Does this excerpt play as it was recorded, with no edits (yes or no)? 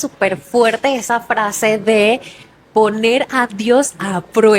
yes